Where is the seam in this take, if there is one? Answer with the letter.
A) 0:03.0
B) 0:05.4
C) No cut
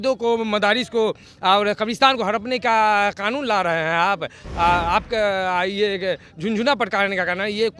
C